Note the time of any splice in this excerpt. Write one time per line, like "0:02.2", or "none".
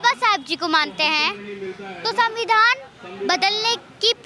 none

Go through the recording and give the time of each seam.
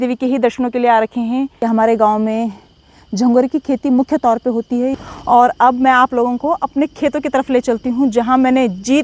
0:01.5
0:04.9

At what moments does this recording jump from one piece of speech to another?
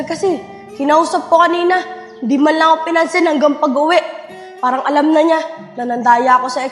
none

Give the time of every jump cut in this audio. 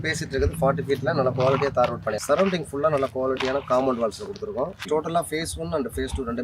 0:02.1
0:04.8

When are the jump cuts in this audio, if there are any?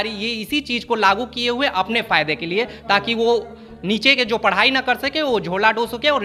none

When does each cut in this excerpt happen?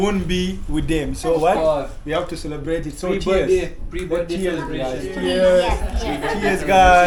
none

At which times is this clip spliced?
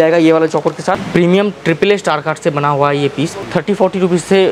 0:01.0
0:03.4

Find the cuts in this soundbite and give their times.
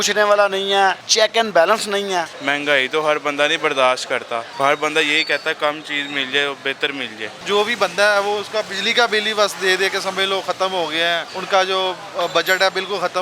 0:01.0
0:02.4
0:04.5
0:07.4
0:11.3

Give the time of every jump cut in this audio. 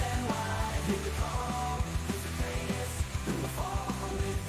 none

